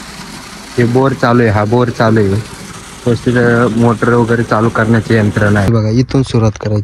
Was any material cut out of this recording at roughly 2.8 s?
no; 1 cut; at 5.7 s

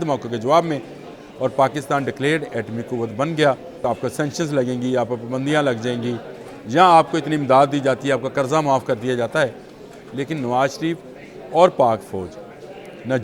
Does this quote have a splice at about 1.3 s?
no; 1 cut; at 3.8 s

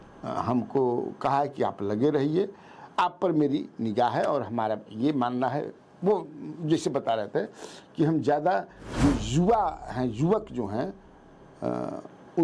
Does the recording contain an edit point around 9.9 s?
no; 0 cuts

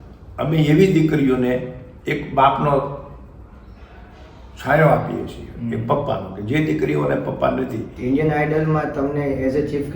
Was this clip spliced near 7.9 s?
yes; 1 cut; at 7.9 s

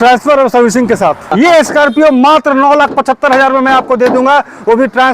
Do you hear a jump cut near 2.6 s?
no; 1 cut; at 1.3 s

